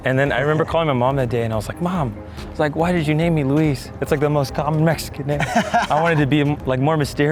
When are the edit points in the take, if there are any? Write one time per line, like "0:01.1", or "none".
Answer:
none